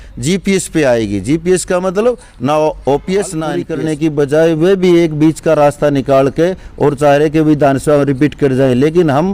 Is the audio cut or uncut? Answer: cut